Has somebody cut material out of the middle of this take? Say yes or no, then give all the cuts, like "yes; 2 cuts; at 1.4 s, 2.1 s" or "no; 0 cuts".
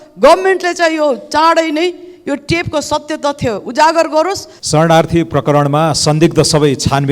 yes; 1 cut; at 4.5 s